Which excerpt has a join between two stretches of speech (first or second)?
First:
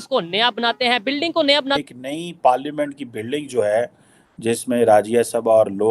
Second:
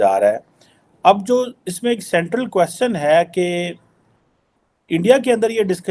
first